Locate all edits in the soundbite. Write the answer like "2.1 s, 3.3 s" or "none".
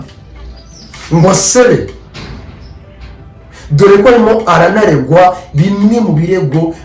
none